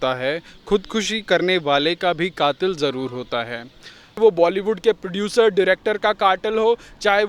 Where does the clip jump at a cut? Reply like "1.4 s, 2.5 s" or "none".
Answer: 4.2 s